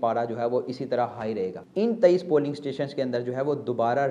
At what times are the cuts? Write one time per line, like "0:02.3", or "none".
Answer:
0:01.6